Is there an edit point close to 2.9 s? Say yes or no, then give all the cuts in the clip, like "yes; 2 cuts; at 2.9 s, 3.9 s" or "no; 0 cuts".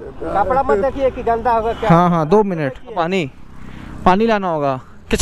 yes; 1 cut; at 2.9 s